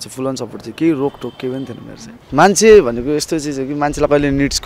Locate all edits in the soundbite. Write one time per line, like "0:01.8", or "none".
0:02.2

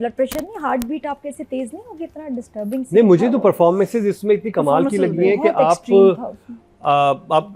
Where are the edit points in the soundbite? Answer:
none

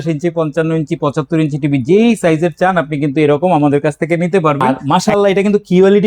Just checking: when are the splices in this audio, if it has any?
0:04.7

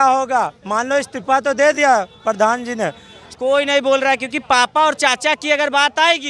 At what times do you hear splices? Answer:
0:03.2

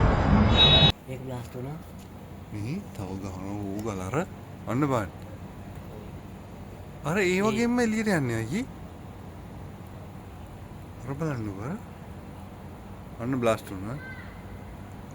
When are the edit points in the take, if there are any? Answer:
0:00.9

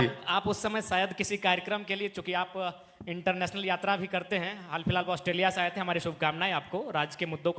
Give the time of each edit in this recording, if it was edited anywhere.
none

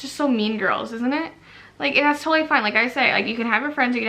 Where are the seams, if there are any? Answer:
none

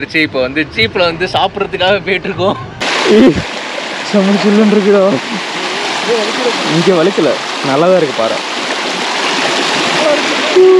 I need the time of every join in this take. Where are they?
0:02.8

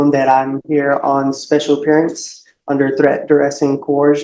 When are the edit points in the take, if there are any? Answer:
none

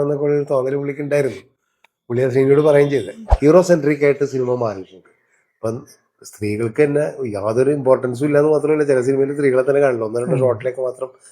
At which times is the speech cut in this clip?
0:03.2

